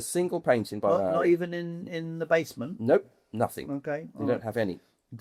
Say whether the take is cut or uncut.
uncut